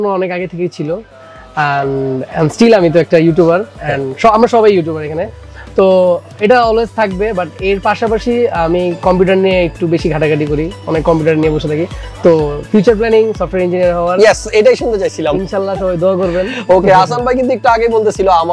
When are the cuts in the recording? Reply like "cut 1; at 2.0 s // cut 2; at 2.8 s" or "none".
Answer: none